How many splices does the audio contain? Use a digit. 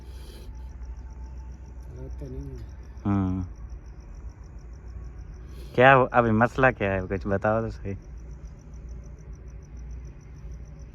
0